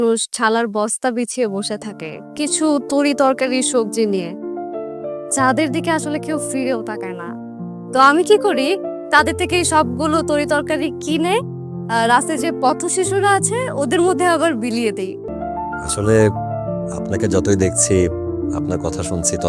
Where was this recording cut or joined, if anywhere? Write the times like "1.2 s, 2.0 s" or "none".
15.3 s